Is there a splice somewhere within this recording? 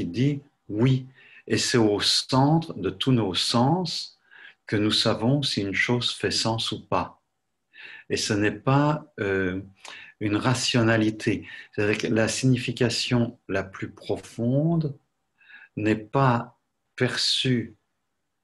yes; 1 cut; at 16.8 s

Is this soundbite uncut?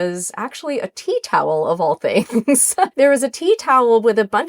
no; 1 cut; at 2.9 s

